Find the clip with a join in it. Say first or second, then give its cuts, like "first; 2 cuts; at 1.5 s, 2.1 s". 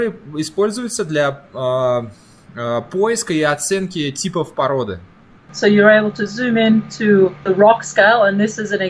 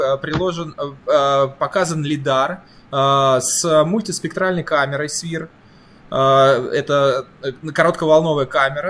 first; 1 cut; at 5.5 s